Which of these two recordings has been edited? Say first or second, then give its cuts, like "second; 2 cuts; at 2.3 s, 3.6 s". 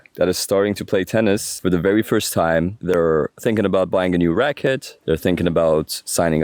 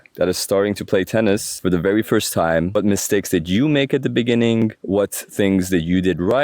second; 1 cut; at 2.7 s